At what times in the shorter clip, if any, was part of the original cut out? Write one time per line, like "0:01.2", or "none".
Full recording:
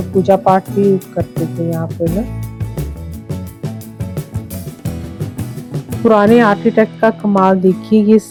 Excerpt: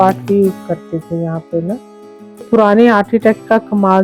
0:02.4